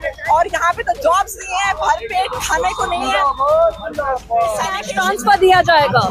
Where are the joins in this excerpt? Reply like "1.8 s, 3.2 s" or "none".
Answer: 4.9 s